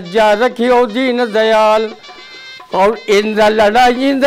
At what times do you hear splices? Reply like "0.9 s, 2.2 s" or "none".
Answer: 2.2 s

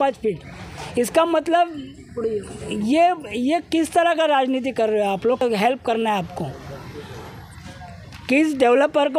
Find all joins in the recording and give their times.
5.4 s

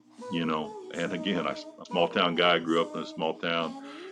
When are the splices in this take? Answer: 1.7 s

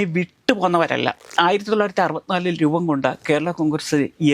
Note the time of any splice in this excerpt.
1.3 s

